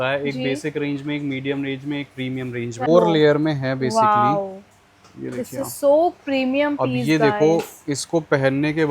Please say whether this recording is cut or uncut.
cut